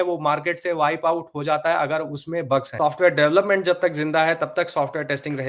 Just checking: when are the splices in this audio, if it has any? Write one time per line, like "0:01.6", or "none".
0:02.7